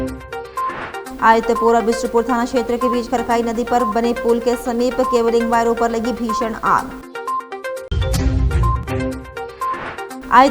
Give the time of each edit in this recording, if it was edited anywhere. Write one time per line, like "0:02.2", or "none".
0:01.0